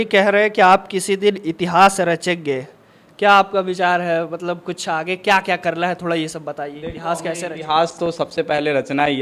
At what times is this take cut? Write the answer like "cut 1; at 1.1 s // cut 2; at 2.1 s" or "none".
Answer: none